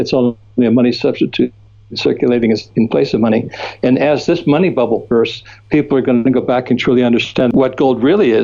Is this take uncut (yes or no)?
no